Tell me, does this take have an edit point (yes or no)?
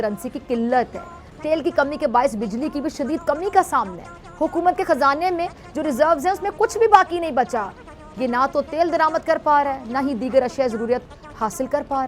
yes